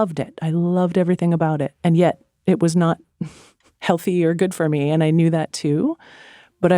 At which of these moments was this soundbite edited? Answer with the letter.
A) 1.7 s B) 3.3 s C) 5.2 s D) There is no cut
A